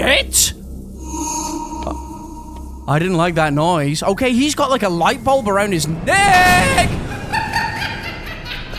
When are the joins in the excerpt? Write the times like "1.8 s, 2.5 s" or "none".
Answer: none

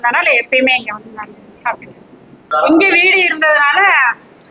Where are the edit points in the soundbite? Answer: 2.4 s

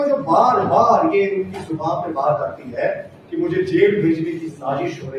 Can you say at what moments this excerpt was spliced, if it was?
none

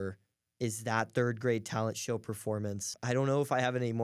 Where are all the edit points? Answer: 2.9 s

